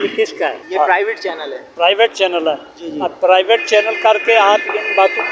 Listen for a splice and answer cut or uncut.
uncut